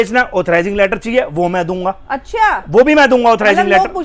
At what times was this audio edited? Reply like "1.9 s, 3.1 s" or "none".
none